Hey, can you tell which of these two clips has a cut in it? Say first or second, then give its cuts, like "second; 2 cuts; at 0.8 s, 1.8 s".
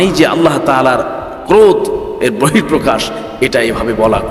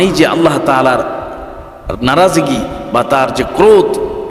first; 1 cut; at 1.4 s